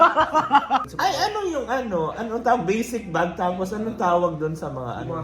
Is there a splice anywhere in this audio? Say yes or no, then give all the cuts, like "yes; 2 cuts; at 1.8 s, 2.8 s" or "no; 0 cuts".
yes; 1 cut; at 0.9 s